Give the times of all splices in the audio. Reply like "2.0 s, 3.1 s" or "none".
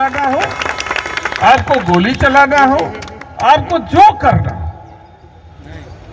none

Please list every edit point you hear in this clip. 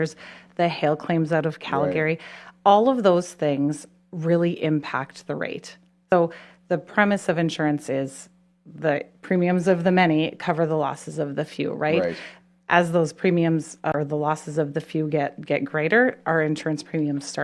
6.1 s, 13.9 s

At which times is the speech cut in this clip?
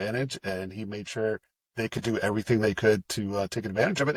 none

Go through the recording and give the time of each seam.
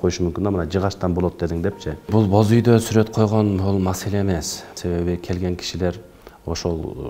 2.1 s, 4.8 s

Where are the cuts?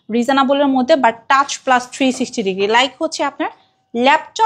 none

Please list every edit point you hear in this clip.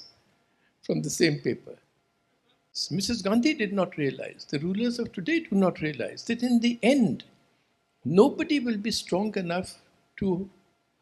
2.8 s

